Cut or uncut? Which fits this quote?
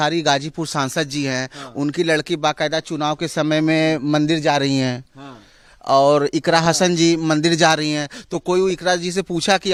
uncut